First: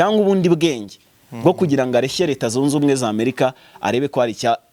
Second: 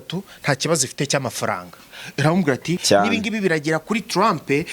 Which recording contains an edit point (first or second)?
second